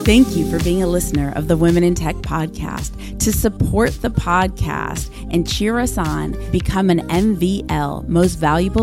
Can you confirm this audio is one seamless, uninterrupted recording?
yes; 0 cuts

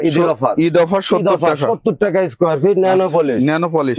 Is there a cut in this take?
no; 0 cuts

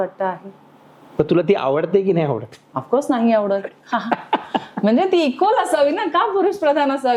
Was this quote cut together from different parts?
no; 0 cuts

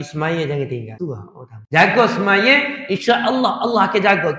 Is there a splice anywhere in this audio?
yes; 1 cut; at 1.0 s

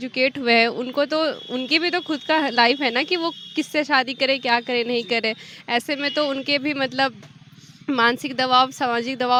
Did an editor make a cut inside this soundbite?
no; 0 cuts

